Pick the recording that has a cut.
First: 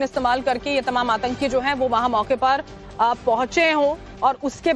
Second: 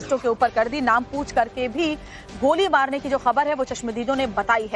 first; 1 cut; at 3.5 s

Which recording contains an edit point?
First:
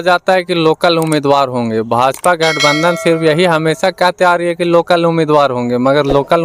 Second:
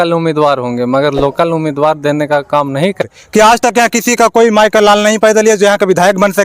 second; 1 cut; at 3.0 s

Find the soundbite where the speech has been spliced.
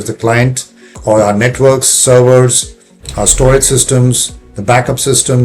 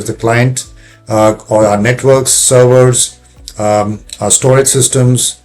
first; 2 cuts; at 1.0 s, 3.0 s

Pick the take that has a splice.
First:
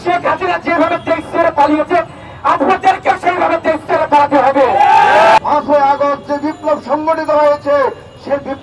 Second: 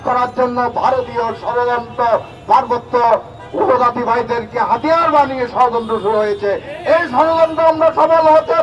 first; 1 cut; at 5.4 s

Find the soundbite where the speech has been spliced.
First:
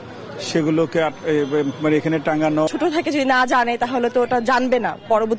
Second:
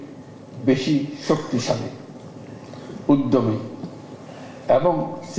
first; 1 cut; at 2.7 s

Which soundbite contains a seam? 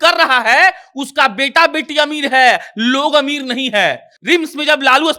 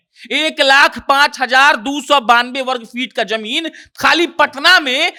first; 1 cut; at 4.1 s

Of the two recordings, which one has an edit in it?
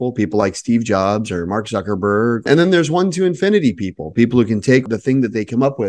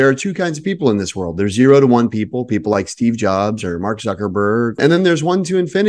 first; 1 cut; at 4.9 s

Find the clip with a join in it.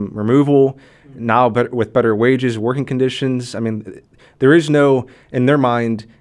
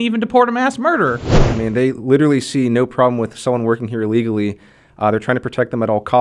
second; 1 cut; at 1.3 s

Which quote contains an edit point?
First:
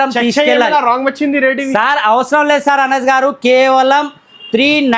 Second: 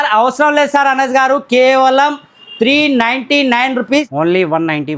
second; 1 cut; at 4.1 s

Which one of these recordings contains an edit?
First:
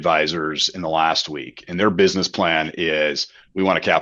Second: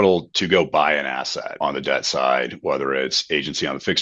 second; 1 cut; at 1.5 s

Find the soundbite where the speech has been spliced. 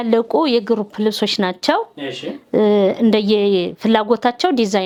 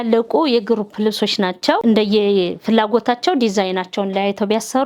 second; 1 cut; at 1.8 s

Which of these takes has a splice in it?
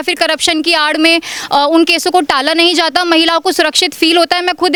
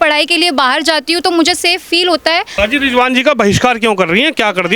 second; 1 cut; at 2.6 s

